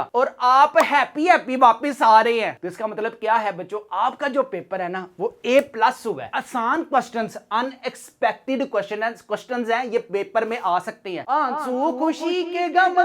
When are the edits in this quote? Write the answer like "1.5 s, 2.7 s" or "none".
2.6 s, 6.3 s, 11.2 s